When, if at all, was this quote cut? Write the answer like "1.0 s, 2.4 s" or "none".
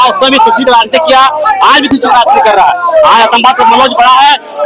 none